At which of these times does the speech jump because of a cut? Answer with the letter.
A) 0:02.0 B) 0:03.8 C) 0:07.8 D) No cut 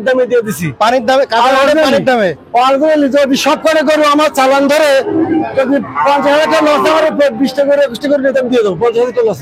D